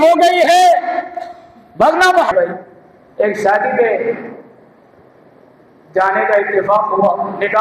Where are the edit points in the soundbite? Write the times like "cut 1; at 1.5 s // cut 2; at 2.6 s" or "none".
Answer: cut 1; at 2.3 s